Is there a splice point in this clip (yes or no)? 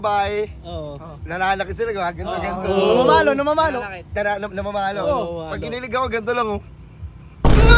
no